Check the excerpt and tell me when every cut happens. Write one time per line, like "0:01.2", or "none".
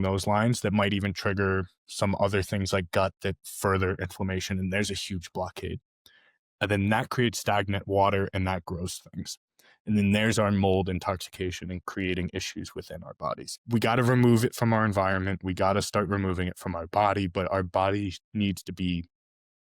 0:13.5